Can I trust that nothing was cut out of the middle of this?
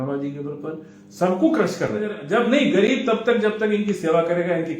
no; 1 cut; at 2.2 s

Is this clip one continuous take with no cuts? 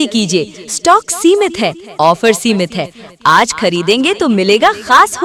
yes; 0 cuts

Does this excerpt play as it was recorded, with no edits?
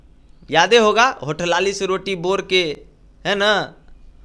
yes; 0 cuts

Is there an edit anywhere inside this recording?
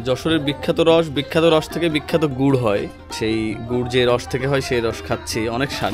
yes; 1 cut; at 3.0 s

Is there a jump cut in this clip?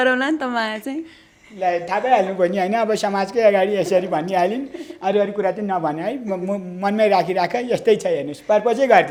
no; 0 cuts

